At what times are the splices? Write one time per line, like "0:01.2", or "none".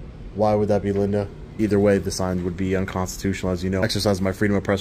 0:01.5
0:03.8